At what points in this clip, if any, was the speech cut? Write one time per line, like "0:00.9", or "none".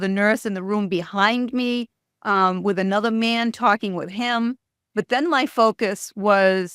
none